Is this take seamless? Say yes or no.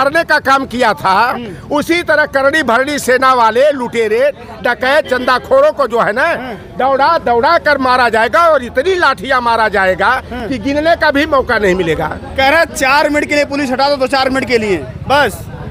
yes